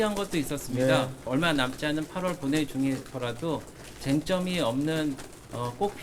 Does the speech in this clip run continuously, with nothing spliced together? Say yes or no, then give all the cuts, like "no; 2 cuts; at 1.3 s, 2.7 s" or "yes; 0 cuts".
no; 1 cut; at 1.2 s